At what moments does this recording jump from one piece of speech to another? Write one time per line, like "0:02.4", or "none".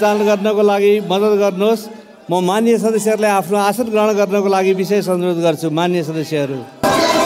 none